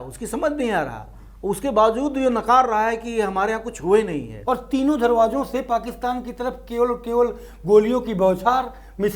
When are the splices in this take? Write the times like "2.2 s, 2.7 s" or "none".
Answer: 4.3 s